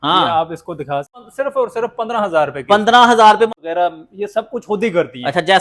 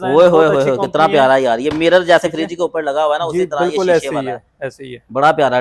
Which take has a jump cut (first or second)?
first